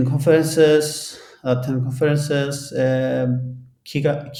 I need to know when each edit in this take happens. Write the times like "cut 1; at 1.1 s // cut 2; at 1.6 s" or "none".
none